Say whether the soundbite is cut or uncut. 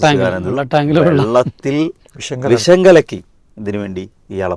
uncut